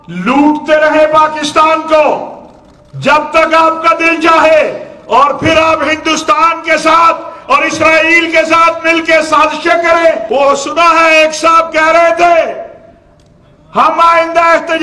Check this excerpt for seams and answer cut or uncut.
cut